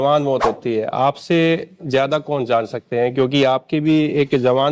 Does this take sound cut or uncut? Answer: uncut